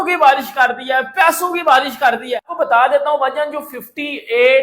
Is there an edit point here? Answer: yes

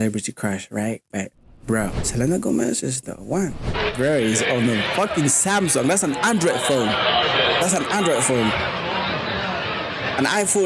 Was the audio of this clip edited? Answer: yes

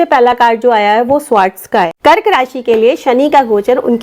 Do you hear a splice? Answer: yes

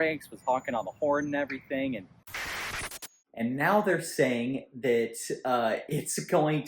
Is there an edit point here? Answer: yes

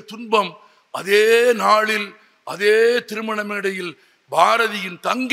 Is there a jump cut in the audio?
no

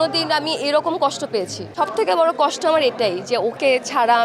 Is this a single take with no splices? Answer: no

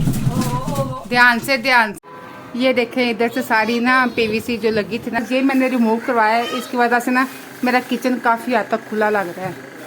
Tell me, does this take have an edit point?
yes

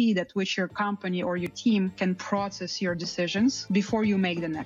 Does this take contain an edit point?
yes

